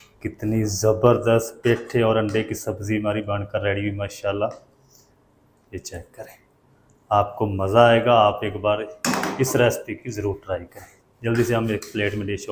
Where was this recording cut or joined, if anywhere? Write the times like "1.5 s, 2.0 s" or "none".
none

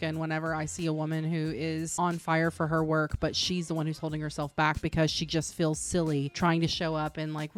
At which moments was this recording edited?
1.9 s

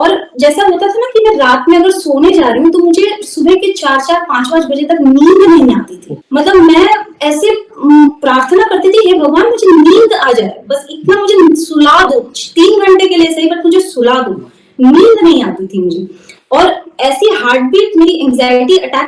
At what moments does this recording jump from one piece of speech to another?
none

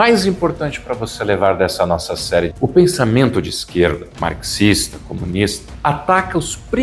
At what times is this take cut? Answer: 2.5 s, 4.1 s, 5.7 s

